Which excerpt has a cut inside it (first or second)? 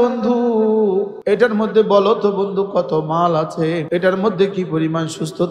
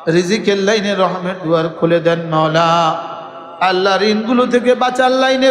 first